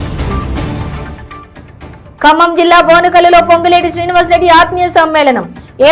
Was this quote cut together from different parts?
yes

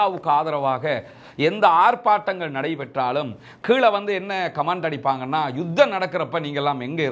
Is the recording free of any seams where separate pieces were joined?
yes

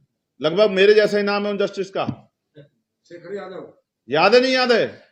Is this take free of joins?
yes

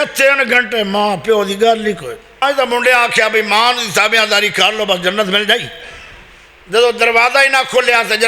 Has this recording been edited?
yes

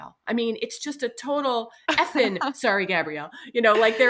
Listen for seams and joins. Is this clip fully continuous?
yes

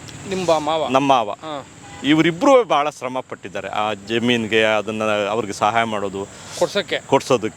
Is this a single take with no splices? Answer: yes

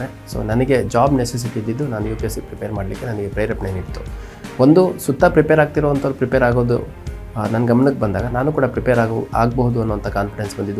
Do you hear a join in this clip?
no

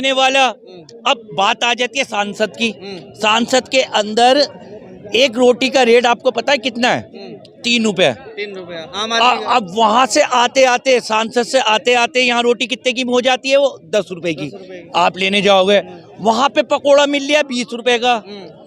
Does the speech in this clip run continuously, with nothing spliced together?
yes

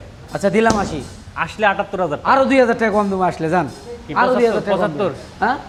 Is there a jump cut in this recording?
no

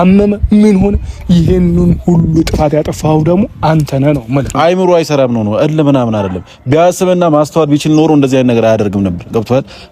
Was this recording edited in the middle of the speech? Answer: yes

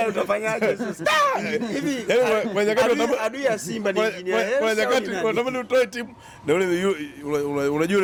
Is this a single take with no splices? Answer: yes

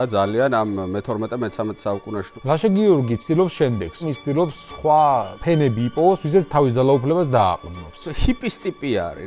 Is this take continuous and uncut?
no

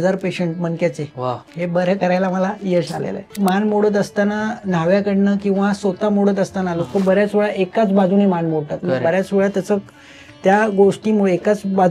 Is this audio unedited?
no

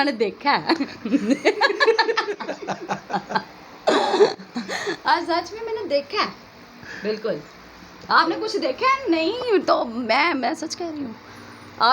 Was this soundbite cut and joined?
no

